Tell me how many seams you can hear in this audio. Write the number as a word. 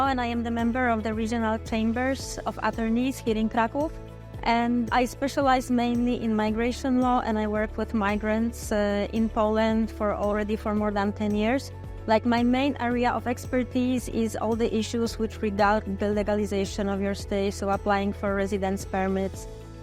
zero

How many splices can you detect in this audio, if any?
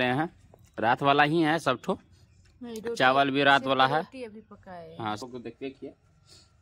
one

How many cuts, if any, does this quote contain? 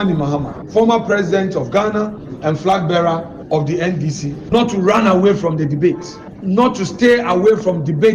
one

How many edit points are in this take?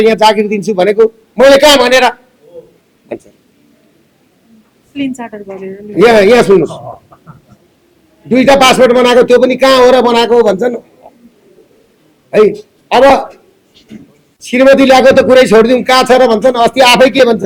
zero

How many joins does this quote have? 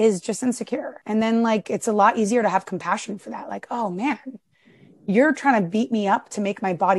one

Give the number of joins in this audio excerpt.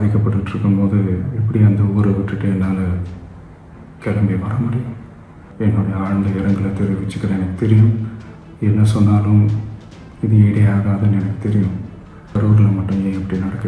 two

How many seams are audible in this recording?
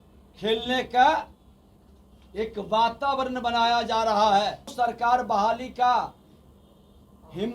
one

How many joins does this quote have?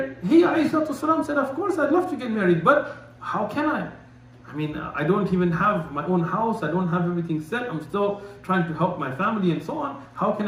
zero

